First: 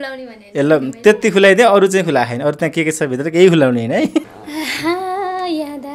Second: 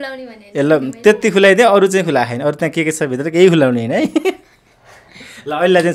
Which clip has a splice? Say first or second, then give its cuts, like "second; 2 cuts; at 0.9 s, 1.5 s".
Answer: first; 1 cut; at 4.2 s